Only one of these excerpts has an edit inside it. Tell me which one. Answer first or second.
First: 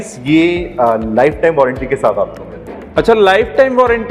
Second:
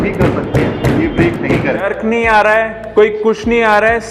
second